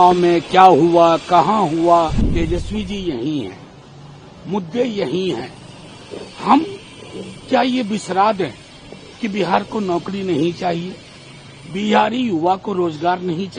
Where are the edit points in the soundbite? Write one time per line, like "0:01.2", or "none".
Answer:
0:02.2